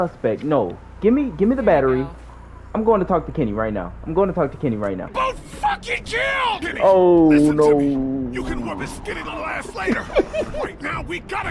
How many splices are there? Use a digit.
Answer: 1